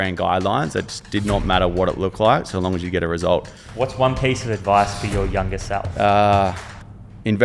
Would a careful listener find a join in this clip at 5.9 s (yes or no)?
yes